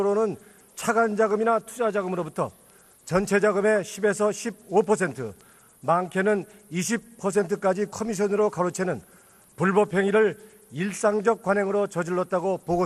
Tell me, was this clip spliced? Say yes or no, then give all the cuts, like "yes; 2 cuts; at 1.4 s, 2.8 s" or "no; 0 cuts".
yes; 1 cut; at 7.3 s